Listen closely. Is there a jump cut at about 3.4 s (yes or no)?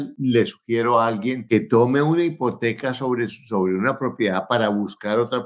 no